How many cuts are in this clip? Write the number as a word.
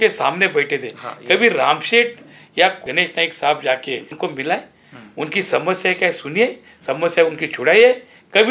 two